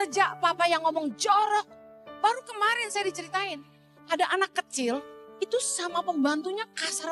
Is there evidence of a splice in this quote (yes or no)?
yes